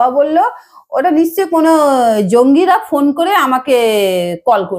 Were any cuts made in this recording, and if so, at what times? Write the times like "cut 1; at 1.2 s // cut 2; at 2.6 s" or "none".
none